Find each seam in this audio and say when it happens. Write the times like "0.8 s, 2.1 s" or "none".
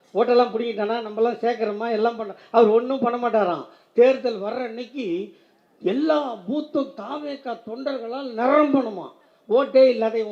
none